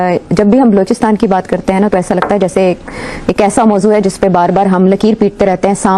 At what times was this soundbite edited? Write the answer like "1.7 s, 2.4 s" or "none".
none